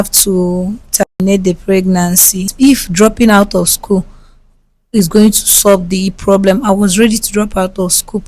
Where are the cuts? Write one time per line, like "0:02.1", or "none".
0:02.5